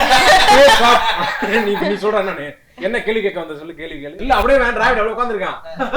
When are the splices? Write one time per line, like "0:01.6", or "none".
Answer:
0:04.1